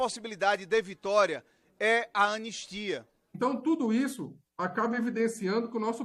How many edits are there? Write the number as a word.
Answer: one